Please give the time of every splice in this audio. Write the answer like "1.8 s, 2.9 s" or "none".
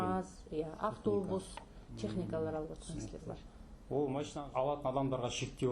4.3 s